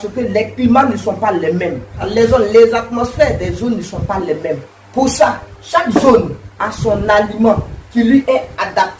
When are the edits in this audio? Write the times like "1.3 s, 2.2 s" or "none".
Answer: 2.1 s